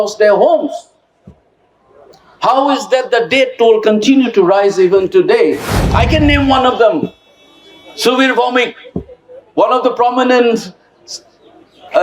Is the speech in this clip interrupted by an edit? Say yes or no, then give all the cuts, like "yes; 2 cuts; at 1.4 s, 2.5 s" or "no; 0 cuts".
yes; 1 cut; at 5.8 s